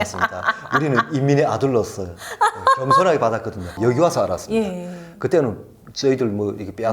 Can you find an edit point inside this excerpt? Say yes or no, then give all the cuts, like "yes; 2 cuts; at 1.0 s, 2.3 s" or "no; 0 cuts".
yes; 1 cut; at 3.7 s